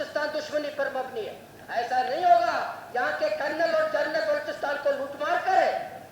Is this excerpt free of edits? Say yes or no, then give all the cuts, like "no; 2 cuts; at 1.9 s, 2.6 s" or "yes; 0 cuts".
no; 1 cut; at 1.5 s